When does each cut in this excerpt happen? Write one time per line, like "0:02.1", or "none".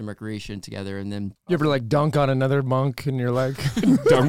0:01.4